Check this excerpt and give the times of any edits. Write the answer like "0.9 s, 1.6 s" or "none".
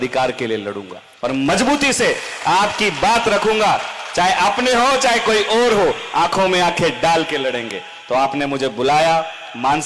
none